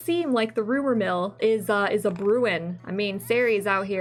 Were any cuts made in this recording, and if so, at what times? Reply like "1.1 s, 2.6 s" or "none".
none